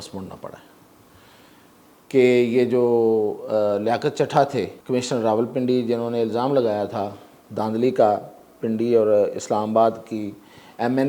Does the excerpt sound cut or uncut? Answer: cut